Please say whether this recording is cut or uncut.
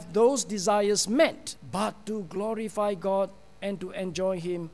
cut